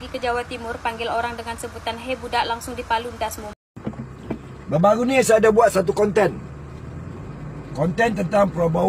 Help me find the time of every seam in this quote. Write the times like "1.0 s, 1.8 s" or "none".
3.5 s

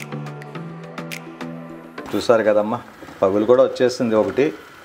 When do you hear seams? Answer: 2.0 s

